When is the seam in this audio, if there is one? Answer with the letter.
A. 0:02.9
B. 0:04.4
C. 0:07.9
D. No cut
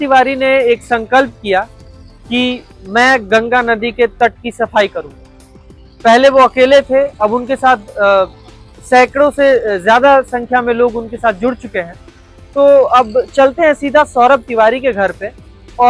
D